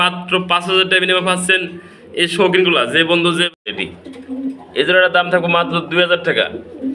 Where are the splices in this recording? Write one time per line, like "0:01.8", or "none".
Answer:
0:03.7